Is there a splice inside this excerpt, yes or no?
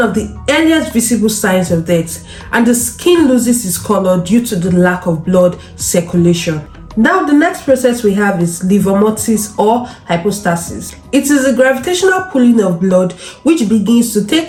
no